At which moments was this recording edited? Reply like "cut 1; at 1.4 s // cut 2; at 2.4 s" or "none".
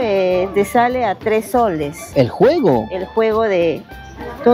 none